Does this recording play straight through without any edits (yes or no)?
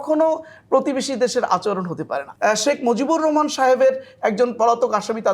no